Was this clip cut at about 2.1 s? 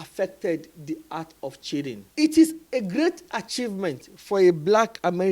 yes; 1 cut; at 2.1 s

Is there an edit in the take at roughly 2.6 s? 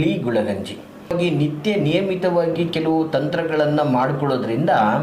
no; 1 cut; at 1.1 s

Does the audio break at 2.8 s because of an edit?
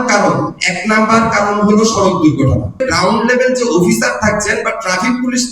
yes; 1 cut; at 2.8 s

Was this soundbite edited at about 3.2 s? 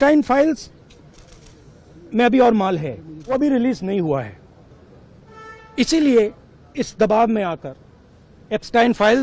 yes; 1 cut; at 3.2 s

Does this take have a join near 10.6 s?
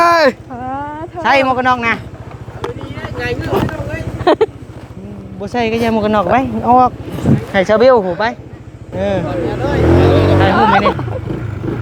no; 1 cut; at 9.3 s

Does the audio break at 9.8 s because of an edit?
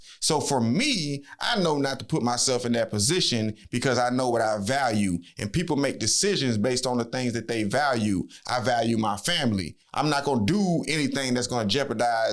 yes; 1 cut; at 9.8 s

